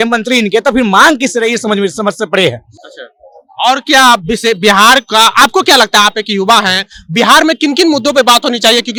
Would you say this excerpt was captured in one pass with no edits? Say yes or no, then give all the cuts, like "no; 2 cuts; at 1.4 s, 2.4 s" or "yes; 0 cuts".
yes; 0 cuts